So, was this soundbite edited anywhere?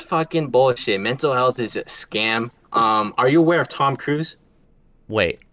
no; 0 cuts

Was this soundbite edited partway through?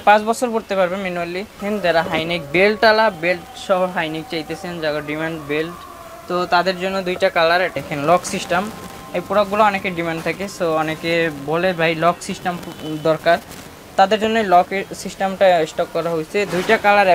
yes; 2 cuts; at 1.6 s, 7.7 s

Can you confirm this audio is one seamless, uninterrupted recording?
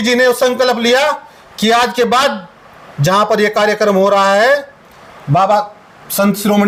yes; 0 cuts

